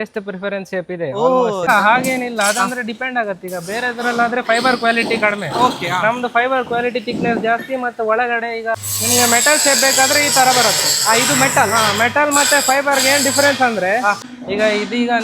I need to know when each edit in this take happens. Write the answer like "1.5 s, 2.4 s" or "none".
1.7 s, 8.7 s, 14.3 s